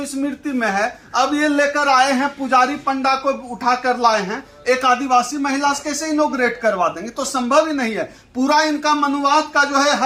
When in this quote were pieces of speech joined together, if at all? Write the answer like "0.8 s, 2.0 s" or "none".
none